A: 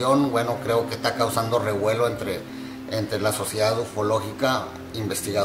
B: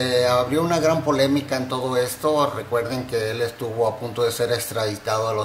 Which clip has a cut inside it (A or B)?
B